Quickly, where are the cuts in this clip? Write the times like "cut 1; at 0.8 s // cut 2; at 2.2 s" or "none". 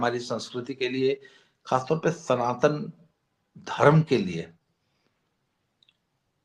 none